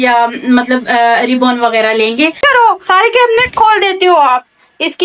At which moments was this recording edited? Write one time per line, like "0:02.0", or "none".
0:02.4